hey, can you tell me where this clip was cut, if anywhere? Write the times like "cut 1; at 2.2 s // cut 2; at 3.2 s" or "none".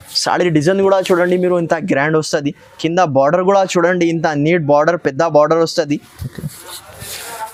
none